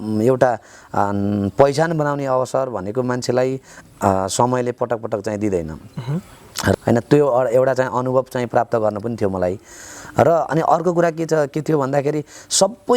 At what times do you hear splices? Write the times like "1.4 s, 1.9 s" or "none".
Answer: 6.7 s